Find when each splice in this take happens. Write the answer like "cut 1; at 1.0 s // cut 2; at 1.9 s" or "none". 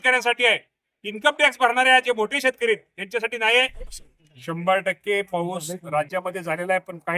cut 1; at 4.1 s

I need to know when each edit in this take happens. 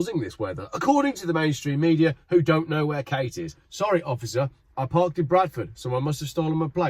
cut 1; at 3.6 s

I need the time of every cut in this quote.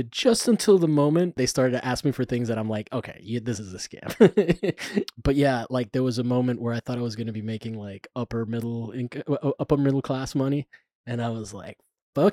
cut 1; at 1.4 s // cut 2; at 5.0 s

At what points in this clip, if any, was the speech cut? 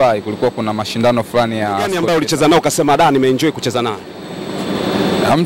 cut 1; at 2.0 s

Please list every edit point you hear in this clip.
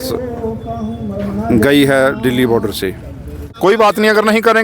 cut 1; at 3.4 s

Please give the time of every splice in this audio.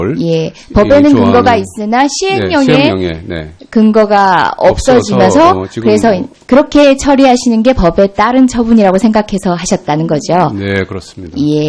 cut 1; at 1.3 s

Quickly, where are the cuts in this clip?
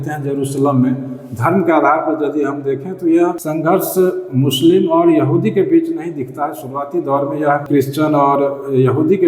cut 1; at 3.4 s // cut 2; at 7.6 s

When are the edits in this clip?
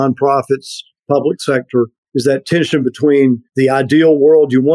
cut 1; at 2.0 s // cut 2; at 3.5 s

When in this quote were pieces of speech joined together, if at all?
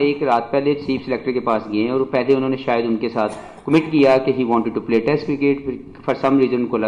none

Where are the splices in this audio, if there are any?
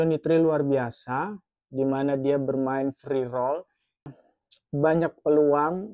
cut 1; at 4.2 s

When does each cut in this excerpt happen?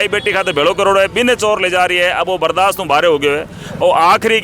none

